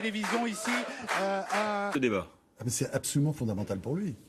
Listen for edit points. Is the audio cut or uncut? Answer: uncut